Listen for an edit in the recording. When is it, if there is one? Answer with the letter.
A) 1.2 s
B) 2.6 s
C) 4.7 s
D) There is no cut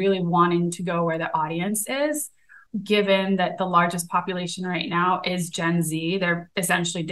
B